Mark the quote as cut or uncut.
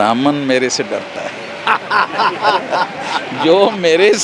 uncut